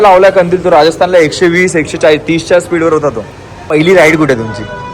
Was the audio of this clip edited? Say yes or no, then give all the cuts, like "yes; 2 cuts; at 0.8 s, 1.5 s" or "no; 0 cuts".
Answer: yes; 1 cut; at 3.7 s